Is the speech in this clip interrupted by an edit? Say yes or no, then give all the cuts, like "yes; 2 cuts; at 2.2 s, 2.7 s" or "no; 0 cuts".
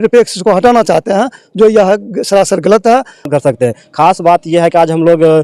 yes; 1 cut; at 3.3 s